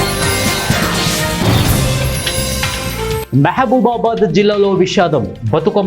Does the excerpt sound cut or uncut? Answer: cut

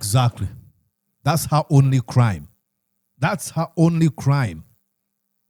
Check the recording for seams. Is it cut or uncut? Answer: uncut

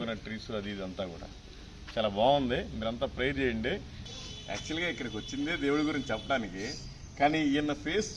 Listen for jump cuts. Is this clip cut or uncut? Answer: cut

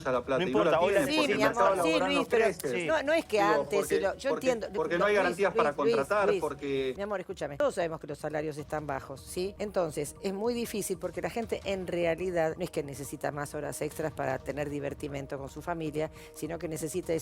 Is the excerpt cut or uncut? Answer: cut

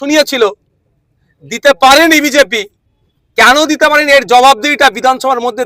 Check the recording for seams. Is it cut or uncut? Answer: uncut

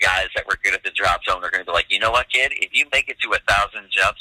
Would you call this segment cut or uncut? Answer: uncut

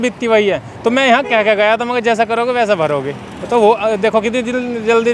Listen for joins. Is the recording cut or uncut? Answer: uncut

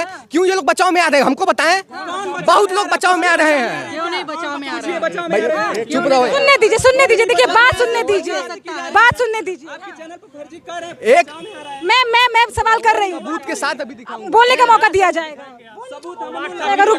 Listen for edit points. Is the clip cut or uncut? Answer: uncut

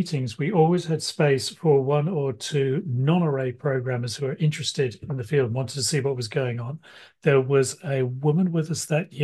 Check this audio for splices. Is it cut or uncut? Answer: uncut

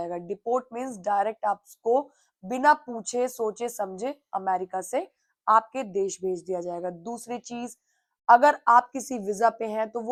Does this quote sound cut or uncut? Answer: uncut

